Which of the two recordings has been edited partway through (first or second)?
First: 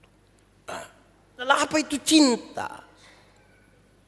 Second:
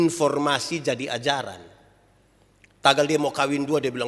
first